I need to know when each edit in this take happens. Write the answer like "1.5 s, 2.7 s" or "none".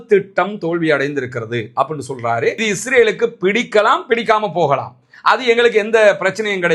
2.6 s